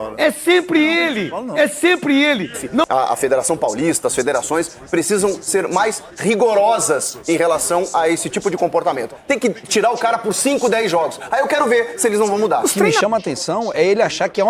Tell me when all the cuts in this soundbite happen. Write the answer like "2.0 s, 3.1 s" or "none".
2.8 s, 13.0 s